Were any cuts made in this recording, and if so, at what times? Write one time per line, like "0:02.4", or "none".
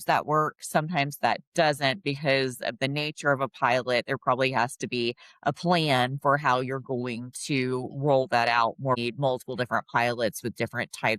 0:09.0